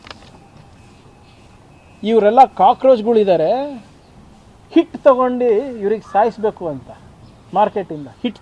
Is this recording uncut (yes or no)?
yes